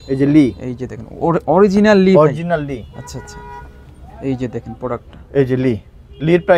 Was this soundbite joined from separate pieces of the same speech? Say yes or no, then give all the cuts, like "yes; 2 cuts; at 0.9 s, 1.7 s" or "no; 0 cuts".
no; 0 cuts